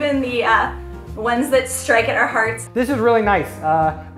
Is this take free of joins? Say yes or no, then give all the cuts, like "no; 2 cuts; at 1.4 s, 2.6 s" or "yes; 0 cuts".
no; 1 cut; at 2.6 s